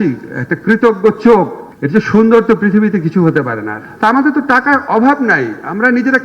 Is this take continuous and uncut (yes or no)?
no